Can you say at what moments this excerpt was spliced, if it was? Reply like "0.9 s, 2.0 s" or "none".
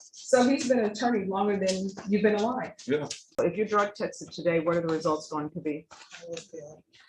3.4 s